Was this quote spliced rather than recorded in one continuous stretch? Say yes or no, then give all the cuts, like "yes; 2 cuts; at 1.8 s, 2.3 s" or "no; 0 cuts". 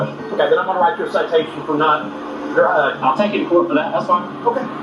yes; 1 cut; at 2.9 s